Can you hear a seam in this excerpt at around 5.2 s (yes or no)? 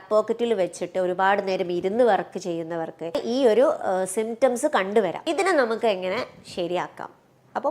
yes